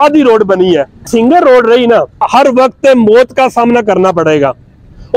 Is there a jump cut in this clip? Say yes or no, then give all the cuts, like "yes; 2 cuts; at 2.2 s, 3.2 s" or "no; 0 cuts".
yes; 2 cuts; at 1.0 s, 2.2 s